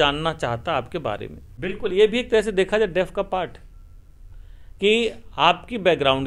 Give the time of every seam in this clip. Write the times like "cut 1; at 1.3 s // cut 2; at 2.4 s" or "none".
cut 1; at 1.5 s